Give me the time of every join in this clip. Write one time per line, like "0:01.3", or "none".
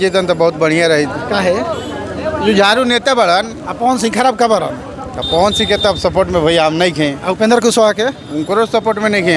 none